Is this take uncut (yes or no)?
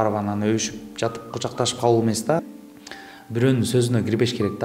no